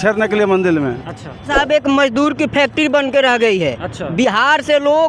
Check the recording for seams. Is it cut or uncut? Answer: cut